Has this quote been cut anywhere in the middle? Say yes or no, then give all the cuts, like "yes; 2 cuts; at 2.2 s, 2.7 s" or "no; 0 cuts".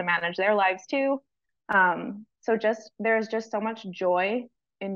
no; 0 cuts